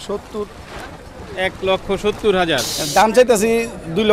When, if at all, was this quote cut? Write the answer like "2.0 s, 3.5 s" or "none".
2.8 s